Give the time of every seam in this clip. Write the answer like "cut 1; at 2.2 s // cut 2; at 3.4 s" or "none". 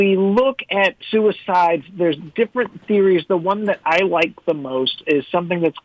cut 1; at 1.0 s